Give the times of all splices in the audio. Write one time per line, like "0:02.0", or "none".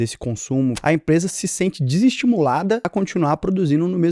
0:00.8
0:02.8